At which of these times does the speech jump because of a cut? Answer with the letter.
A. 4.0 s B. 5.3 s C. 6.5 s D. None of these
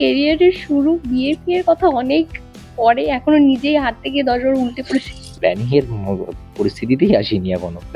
B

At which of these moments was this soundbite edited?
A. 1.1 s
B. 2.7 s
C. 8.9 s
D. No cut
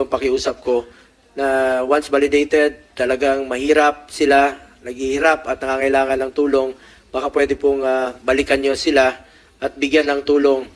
D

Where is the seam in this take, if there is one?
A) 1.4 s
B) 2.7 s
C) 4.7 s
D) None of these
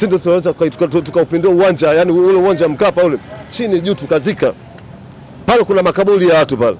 D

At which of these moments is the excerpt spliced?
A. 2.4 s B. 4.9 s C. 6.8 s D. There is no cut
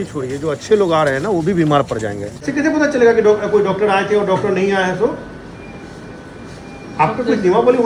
A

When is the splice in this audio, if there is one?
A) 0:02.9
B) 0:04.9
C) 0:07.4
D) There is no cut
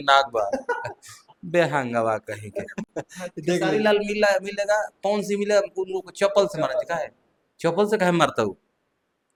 D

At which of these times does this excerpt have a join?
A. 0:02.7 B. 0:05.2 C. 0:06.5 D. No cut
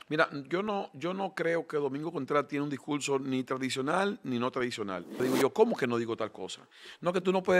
B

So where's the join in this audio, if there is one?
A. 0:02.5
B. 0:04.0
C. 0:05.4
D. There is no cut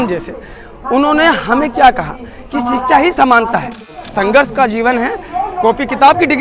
B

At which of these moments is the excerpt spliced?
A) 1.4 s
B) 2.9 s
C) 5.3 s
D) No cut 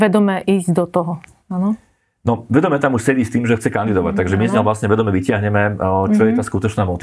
D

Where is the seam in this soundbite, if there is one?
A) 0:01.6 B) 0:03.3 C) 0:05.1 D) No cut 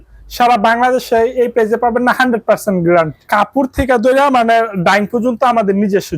B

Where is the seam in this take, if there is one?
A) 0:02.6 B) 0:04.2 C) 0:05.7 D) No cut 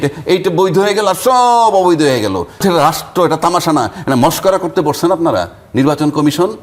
A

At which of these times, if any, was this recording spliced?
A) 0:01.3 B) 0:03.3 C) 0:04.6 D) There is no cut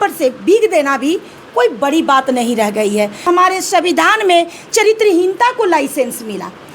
B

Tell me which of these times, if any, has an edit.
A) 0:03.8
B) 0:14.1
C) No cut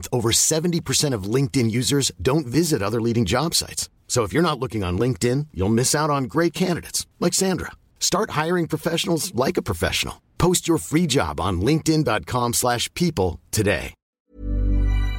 B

